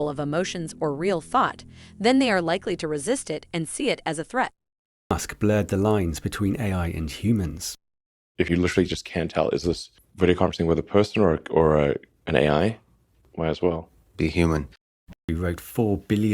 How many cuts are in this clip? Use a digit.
2